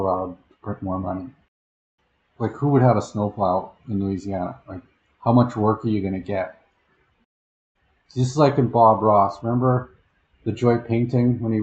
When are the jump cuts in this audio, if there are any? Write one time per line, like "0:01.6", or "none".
0:01.6
0:07.4

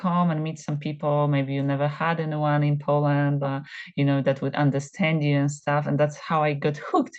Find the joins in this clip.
0:03.5

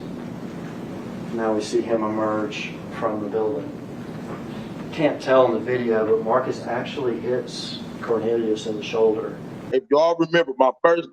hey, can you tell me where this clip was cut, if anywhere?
0:09.7

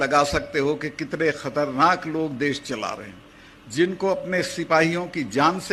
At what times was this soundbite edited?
none

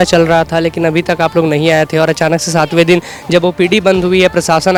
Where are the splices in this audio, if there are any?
none

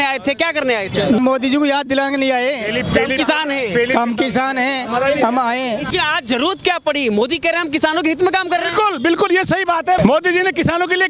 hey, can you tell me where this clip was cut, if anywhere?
0:01.2
0:05.9
0:10.0

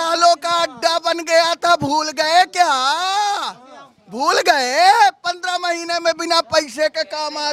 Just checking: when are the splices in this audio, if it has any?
none

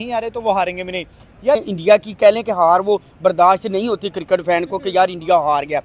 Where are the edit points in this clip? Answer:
0:01.6

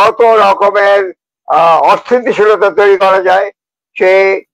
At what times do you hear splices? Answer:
none

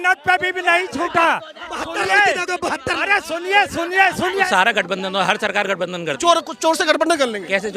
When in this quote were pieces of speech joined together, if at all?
0:04.5

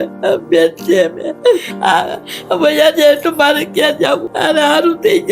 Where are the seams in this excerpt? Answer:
0:04.3

